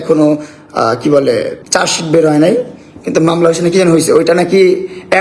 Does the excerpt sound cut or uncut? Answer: uncut